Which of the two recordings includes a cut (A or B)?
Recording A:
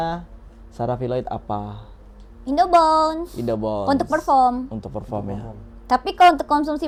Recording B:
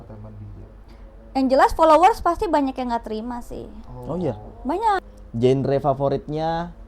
B